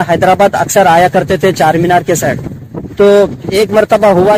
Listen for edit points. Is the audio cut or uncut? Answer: uncut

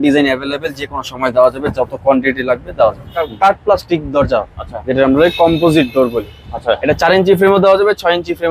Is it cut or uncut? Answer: cut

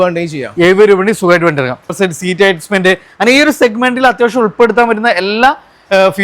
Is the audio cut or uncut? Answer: cut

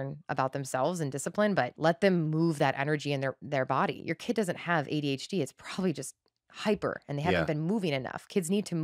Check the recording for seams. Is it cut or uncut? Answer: cut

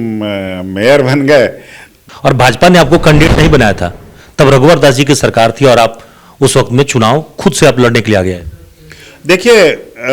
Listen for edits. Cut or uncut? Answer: cut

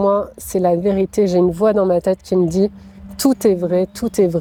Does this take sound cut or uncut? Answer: uncut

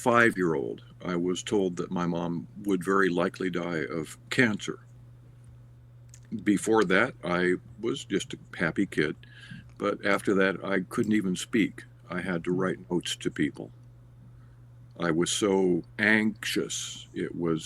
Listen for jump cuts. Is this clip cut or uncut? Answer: cut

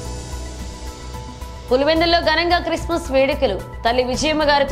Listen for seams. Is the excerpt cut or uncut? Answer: cut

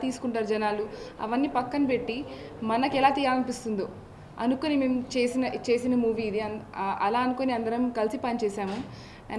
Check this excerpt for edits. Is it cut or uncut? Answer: uncut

